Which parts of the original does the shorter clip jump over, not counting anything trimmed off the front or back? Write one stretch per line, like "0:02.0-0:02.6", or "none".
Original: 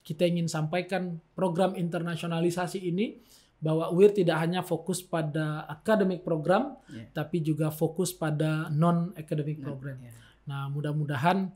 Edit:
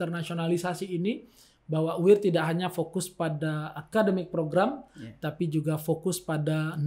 none